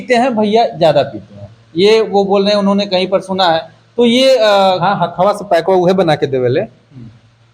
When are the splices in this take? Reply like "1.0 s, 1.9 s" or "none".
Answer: none